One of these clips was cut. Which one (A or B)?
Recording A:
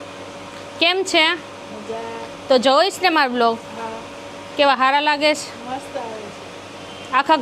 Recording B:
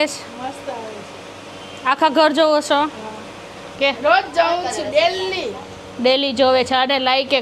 B